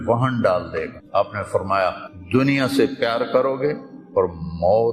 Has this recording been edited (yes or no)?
yes